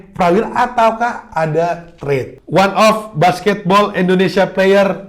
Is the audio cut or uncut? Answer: cut